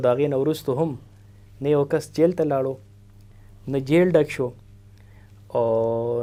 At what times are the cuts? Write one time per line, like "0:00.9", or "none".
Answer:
none